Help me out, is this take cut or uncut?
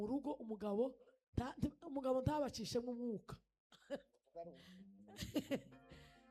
uncut